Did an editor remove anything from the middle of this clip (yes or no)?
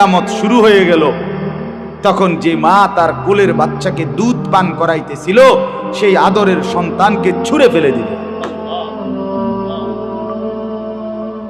yes